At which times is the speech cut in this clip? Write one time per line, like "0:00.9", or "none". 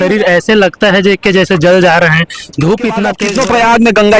0:03.2